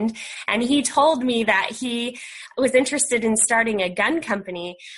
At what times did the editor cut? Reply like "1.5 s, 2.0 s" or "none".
2.5 s